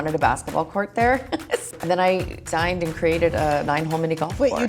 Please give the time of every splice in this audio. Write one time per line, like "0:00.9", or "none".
0:01.7
0:02.4